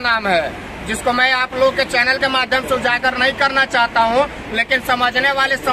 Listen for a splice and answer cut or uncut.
uncut